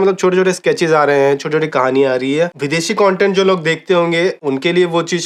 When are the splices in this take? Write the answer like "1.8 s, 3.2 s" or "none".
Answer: none